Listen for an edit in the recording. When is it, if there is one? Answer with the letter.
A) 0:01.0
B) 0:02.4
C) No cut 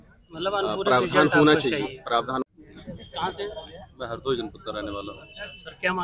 B